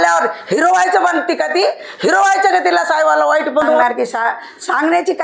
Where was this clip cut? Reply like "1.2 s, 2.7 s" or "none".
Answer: 3.8 s